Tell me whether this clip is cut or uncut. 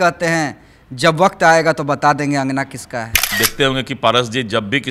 cut